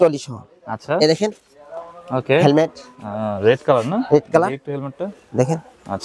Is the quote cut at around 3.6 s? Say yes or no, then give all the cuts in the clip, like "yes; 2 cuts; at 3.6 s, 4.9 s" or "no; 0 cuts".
no; 0 cuts